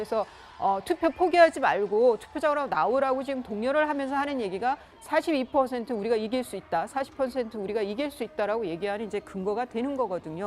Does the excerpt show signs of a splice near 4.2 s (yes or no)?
no